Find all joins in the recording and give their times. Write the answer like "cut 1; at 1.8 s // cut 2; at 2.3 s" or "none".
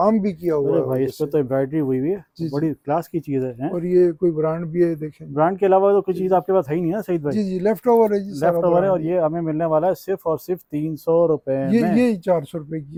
none